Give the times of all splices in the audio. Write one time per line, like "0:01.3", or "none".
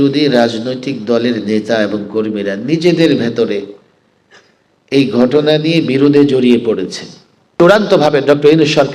0:07.5

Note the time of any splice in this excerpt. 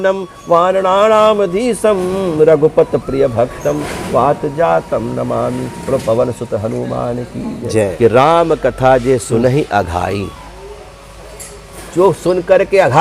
0:07.9

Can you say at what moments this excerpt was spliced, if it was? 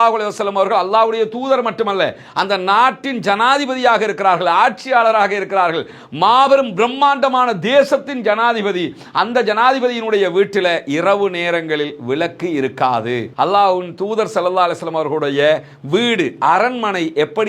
0:13.3

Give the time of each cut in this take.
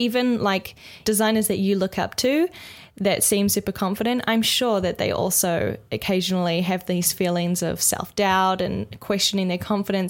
0:01.0

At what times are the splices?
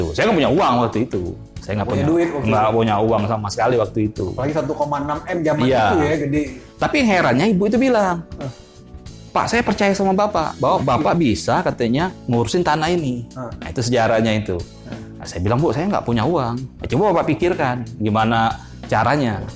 none

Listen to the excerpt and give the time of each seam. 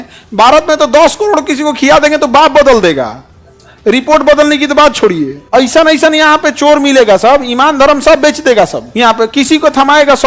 0:05.4
0:08.8

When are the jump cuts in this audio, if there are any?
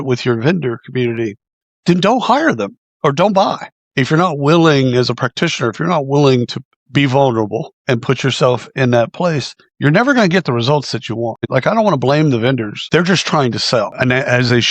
0:11.3
0:12.7
0:13.9

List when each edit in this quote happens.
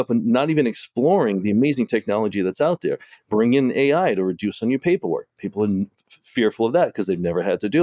none

